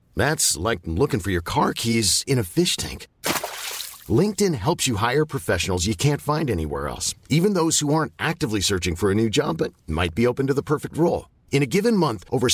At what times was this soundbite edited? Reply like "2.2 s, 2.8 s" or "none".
none